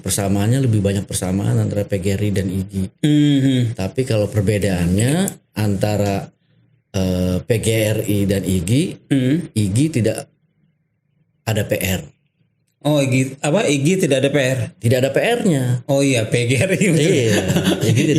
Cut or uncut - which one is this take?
uncut